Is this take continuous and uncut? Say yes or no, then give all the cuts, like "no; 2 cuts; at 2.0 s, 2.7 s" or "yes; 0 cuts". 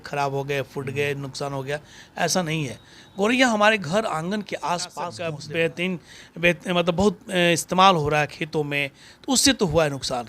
no; 1 cut; at 5.4 s